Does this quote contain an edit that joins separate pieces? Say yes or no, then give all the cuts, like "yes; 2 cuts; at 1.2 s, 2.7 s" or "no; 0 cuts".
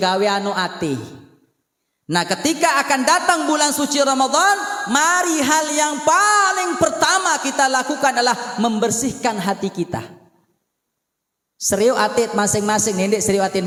no; 0 cuts